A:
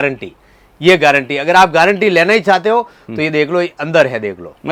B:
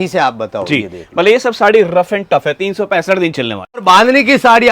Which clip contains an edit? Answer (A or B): B